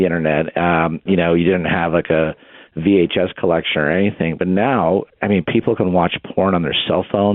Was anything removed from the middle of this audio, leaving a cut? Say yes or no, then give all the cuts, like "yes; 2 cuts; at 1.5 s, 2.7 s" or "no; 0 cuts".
yes; 2 cuts; at 1.0 s, 5.1 s